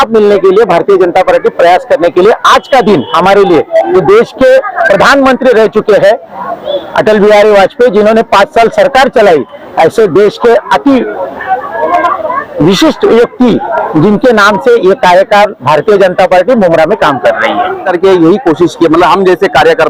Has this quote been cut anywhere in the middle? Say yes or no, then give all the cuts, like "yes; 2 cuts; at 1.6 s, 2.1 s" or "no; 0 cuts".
yes; 1 cut; at 17.8 s